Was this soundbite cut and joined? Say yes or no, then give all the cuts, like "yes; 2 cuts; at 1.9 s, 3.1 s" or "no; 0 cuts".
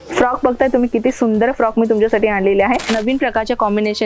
yes; 1 cut; at 2.9 s